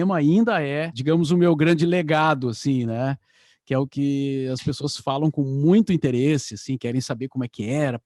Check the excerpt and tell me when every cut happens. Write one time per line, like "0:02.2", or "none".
none